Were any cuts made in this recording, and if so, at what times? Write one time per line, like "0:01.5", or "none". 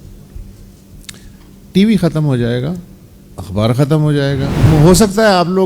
0:04.6